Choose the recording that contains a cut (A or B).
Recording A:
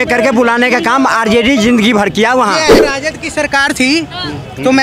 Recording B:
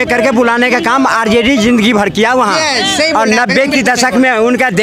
A